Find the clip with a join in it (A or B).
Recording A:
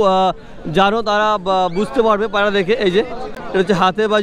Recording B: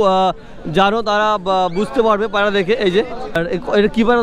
B